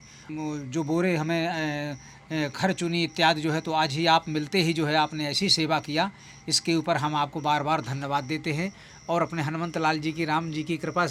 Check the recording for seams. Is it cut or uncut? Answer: uncut